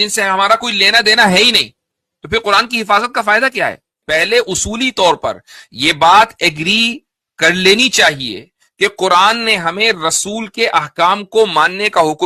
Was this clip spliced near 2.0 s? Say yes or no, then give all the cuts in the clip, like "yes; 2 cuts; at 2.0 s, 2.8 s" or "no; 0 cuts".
no; 1 cut; at 3.9 s